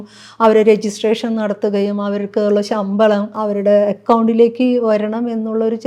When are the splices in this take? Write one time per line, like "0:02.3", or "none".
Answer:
0:03.3